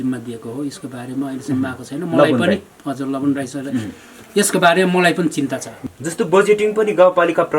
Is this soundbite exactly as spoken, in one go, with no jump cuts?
no; 1 cut; at 5.7 s

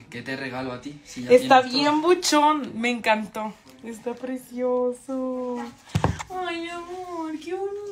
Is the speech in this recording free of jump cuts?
yes; 0 cuts

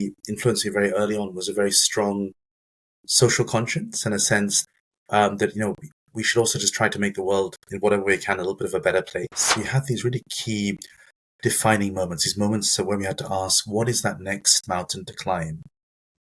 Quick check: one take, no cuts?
no; 2 cuts; at 4.6 s, 9.5 s

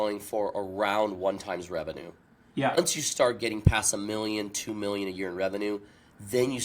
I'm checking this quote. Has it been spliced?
yes; 1 cut; at 2.8 s

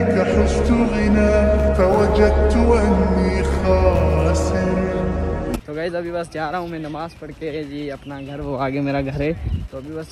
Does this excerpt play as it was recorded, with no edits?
yes; 0 cuts

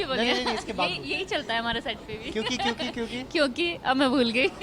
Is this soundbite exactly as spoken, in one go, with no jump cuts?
yes; 0 cuts

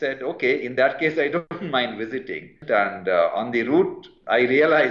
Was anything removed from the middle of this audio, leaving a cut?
yes; 2 cuts; at 1.5 s, 2.5 s

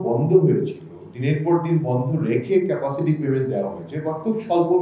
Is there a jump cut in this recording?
no; 0 cuts

